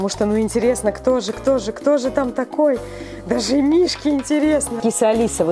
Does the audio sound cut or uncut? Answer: uncut